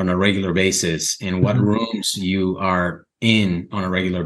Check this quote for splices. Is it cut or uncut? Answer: uncut